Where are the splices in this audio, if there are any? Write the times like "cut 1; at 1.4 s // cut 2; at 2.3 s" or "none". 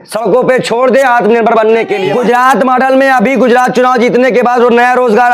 cut 1; at 2.0 s